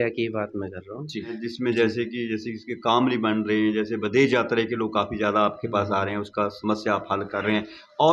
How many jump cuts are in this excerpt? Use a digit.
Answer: 1